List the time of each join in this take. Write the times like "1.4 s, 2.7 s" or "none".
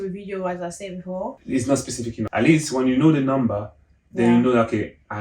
1.4 s, 2.3 s